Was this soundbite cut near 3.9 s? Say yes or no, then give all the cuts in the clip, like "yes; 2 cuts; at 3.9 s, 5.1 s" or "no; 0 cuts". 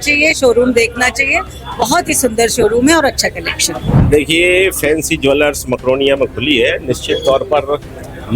yes; 1 cut; at 3.9 s